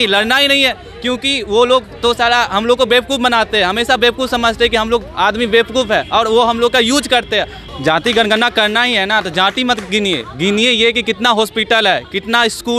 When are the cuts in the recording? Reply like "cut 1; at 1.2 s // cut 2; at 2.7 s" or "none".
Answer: cut 1; at 7.6 s